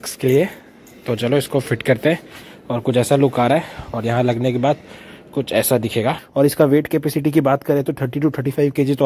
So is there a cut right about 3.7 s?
no; 1 cut; at 6.2 s

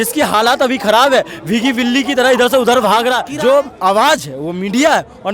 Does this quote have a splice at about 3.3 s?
yes; 1 cut; at 3.3 s

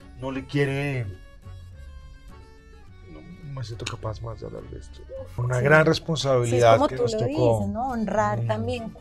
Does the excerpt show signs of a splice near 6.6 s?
no; 1 cut; at 5.4 s

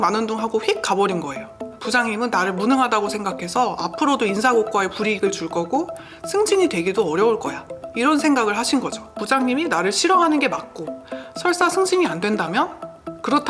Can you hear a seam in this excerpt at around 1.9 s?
yes; 2 cuts; at 1.9 s, 9.3 s

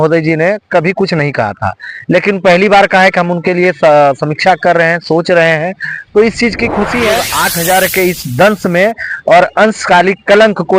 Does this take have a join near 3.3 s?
no; 1 cut; at 7.4 s

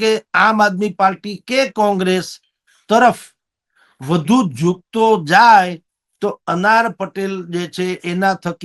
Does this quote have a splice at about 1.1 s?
no; 0 cuts

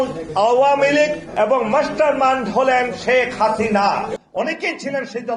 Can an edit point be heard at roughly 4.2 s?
yes; 2 cuts; at 1.2 s, 4.2 s

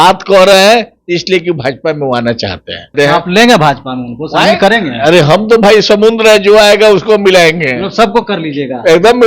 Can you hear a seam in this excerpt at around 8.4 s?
no; 1 cut; at 2.9 s

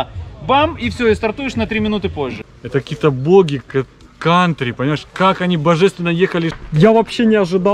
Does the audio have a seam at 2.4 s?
yes; 2 cuts; at 2.4 s, 6.5 s

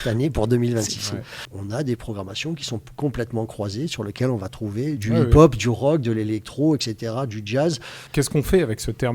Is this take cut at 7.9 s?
yes; 3 cuts; at 1.4 s, 5.0 s, 7.9 s

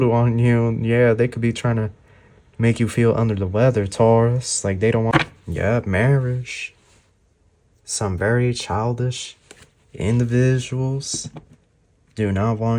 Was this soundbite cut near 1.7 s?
no; 1 cut; at 5.1 s

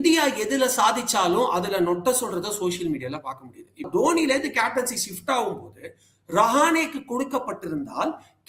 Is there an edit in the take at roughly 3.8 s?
yes; 1 cut; at 3.8 s

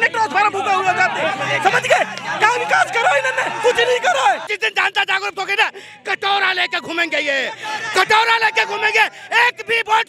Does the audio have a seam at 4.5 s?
yes; 1 cut; at 4.5 s

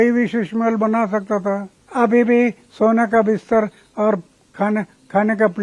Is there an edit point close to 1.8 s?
yes; 1 cut; at 1.8 s

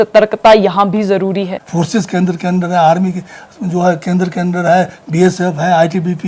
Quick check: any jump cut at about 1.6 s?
yes; 1 cut; at 1.6 s

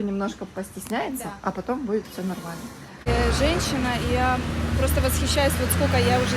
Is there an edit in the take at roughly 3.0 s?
yes; 1 cut; at 3.0 s

